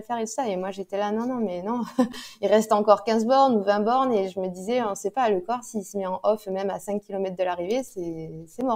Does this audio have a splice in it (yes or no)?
no